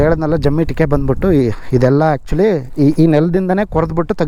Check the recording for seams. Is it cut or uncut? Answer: uncut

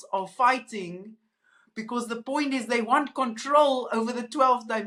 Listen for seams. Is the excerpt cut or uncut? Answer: uncut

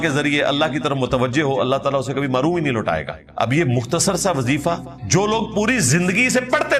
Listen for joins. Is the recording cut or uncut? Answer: cut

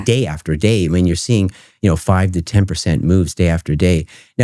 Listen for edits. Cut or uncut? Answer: uncut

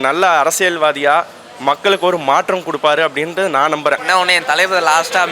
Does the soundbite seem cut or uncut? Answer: cut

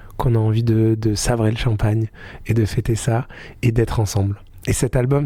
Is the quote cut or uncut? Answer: uncut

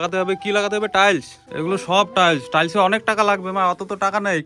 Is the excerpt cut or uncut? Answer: cut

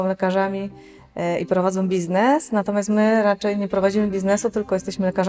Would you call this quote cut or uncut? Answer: uncut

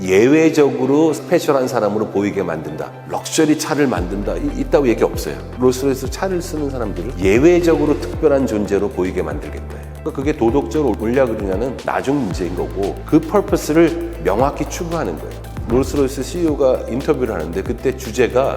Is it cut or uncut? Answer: cut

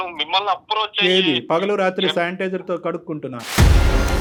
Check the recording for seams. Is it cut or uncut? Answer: uncut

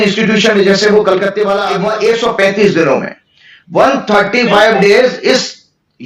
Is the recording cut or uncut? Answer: cut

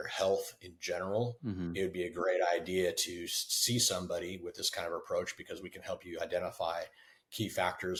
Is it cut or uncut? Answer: uncut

